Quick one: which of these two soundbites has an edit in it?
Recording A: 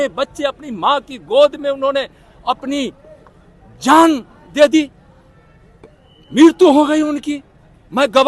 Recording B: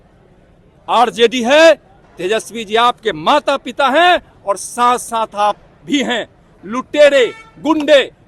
B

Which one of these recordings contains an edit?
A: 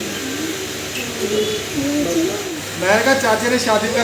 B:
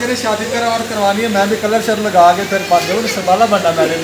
A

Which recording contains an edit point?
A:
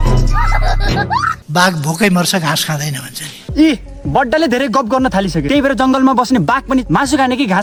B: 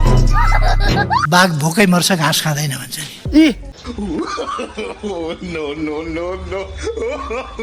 B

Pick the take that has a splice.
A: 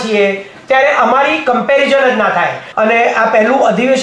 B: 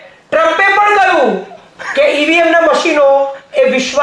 A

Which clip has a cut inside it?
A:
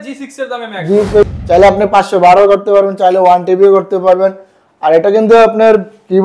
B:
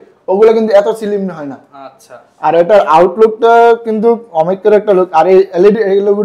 A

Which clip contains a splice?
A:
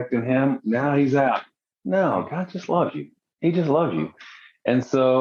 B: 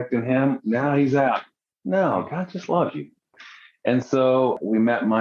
B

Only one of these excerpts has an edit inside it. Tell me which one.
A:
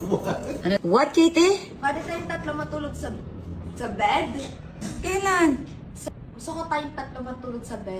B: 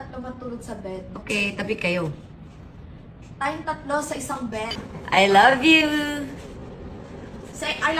B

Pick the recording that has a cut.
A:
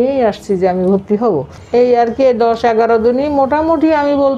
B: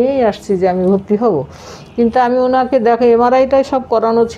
A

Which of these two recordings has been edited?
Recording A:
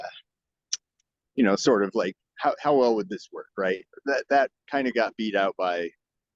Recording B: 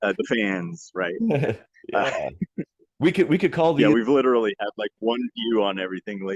A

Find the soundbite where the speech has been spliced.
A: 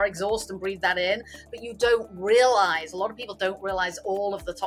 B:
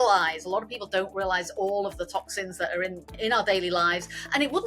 B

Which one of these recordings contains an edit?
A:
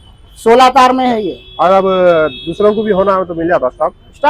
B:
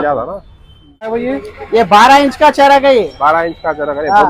B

